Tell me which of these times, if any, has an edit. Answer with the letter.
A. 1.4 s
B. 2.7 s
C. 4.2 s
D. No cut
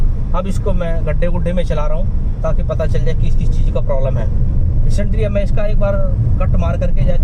D